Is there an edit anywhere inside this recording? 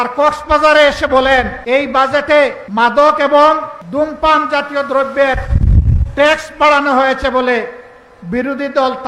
yes; 3 cuts; at 1.6 s, 2.6 s, 3.8 s

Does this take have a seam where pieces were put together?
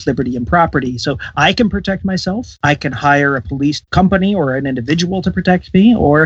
no; 0 cuts

